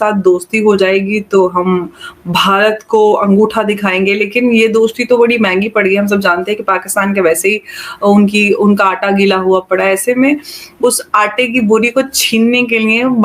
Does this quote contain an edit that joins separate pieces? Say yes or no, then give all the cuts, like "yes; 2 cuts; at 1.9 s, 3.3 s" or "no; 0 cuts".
no; 0 cuts